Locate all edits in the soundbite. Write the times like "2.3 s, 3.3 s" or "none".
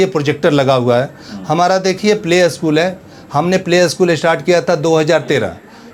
none